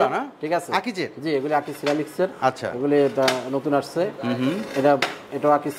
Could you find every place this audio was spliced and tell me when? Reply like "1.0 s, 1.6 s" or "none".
none